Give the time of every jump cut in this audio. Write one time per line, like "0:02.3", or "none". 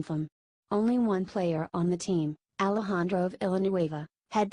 0:02.0